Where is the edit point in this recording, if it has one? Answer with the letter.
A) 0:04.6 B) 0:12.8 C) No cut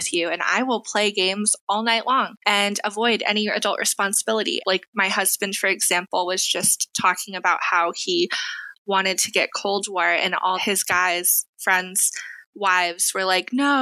A